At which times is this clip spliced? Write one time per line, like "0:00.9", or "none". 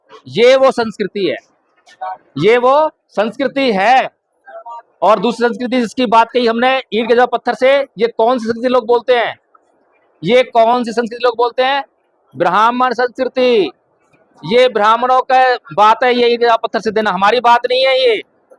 none